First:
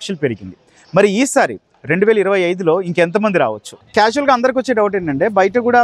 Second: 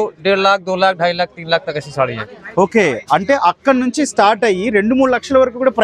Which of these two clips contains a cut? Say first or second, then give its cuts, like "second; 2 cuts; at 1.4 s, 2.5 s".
first; 1 cut; at 3.8 s